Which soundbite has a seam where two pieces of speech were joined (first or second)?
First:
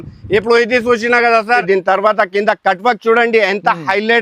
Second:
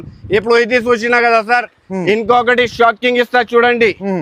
first